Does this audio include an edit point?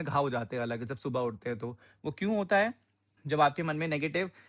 no; 0 cuts

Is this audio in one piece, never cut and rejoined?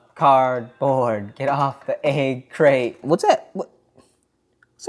no; 1 cut; at 3.0 s

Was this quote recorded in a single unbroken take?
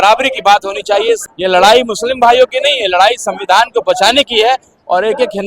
no; 1 cut; at 1.2 s

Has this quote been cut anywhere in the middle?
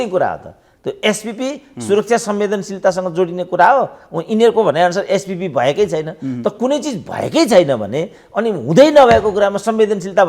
no; 0 cuts

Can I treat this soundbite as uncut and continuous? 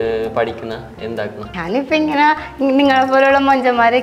no; 1 cut; at 1.5 s

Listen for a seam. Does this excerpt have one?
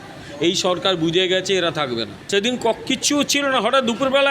yes; 1 cut; at 2.1 s

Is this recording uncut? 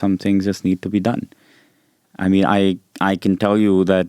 yes; 0 cuts

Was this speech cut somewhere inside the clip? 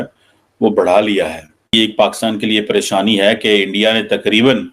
yes; 1 cut; at 1.7 s

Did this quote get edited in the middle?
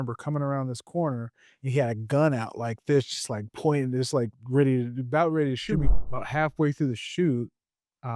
yes; 1 cut; at 5.9 s

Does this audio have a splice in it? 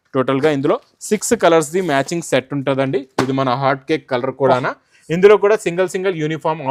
no; 0 cuts

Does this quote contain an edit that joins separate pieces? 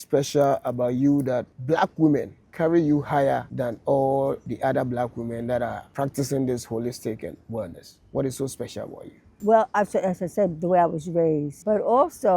yes; 7 cuts; at 1.5 s, 2.4 s, 3.5 s, 4.5 s, 5.8 s, 9.4 s, 11.5 s

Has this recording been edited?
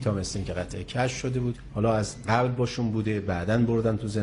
yes; 1 cut; at 1.6 s

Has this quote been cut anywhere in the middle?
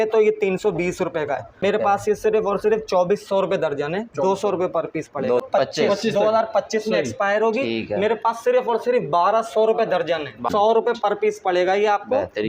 yes; 3 cuts; at 1.5 s, 5.4 s, 10.5 s

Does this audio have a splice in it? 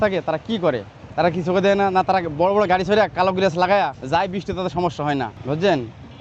yes; 3 cuts; at 1.0 s, 4.0 s, 5.4 s

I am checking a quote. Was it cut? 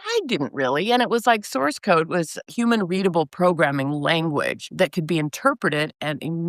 no; 0 cuts

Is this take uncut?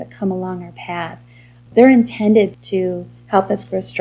no; 2 cuts; at 1.7 s, 2.6 s

